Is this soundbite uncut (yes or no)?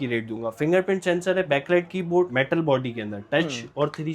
no